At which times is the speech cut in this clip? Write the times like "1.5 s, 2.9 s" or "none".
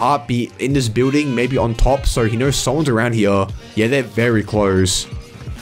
none